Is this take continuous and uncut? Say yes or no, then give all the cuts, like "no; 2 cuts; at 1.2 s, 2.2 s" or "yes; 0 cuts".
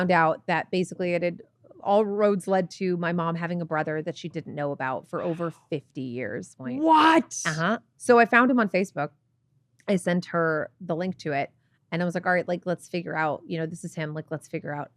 no; 2 cuts; at 6.6 s, 7.8 s